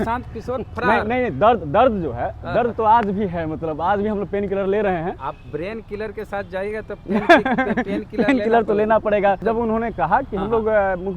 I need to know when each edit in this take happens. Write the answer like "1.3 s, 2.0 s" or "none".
5.3 s, 9.4 s